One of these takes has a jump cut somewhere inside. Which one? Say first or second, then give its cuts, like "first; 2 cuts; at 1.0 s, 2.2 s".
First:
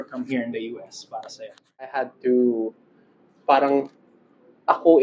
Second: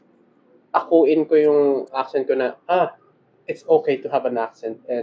first; 1 cut; at 2.1 s